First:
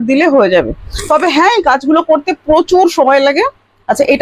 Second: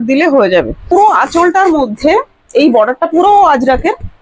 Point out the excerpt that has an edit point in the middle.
second; 1 cut; at 0.9 s

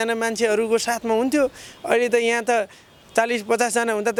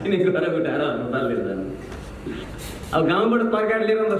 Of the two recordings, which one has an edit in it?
second; 1 cut; at 2.5 s

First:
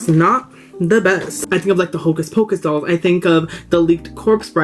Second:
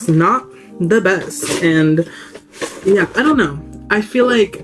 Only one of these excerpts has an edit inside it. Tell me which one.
first; 1 cut; at 1.4 s

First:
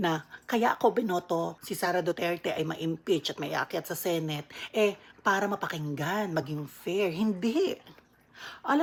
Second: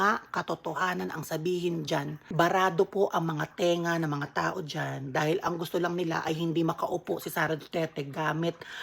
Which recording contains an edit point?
second; 1 cut; at 2.2 s

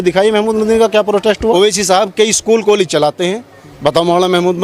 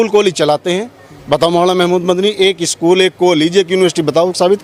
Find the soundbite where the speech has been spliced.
first; 1 cut; at 1.5 s

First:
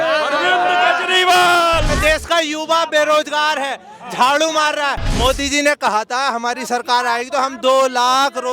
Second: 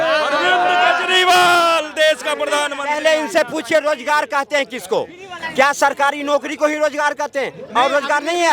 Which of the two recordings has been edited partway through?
first; 2 cuts; at 1.9 s, 5.1 s

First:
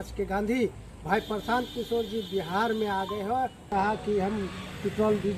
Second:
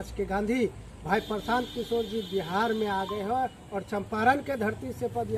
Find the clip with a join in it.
first; 1 cut; at 3.7 s

